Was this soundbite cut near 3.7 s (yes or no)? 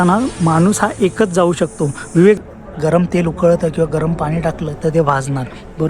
no